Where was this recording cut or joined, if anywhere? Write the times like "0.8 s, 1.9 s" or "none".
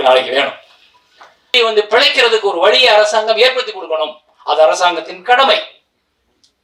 1.5 s